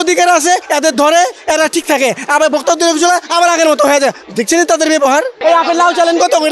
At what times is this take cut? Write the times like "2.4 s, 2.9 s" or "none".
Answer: 5.3 s